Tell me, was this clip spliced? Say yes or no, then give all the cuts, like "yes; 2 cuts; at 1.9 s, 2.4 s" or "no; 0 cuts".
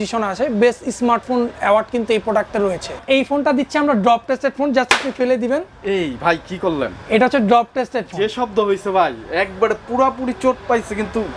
yes; 1 cut; at 3.0 s